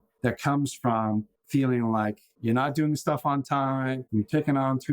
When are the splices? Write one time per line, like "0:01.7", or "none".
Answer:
0:01.4
0:04.0